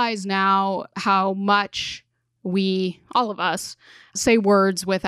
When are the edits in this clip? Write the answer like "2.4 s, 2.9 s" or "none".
0.9 s, 4.2 s